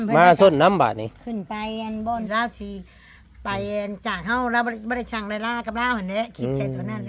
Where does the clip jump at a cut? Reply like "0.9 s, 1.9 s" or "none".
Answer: 2.3 s